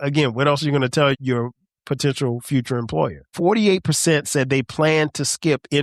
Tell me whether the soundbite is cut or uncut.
cut